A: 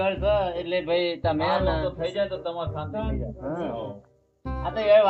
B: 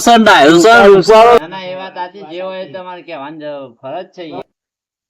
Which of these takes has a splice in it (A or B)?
B